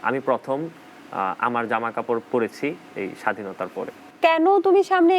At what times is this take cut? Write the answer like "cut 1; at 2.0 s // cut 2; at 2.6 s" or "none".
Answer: cut 1; at 4.1 s

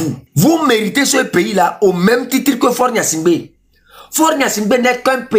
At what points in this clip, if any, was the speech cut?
none

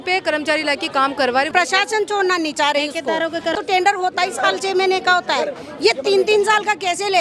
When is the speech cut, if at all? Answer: cut 1; at 1.5 s // cut 2; at 3.5 s

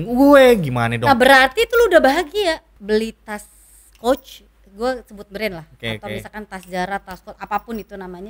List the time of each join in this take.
cut 1; at 2.7 s

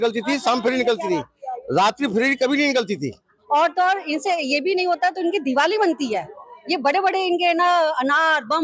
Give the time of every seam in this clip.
cut 1; at 3.3 s

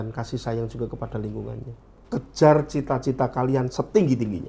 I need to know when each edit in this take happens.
cut 1; at 1.9 s

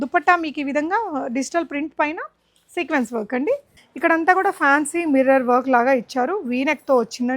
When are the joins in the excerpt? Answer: cut 1; at 3.8 s

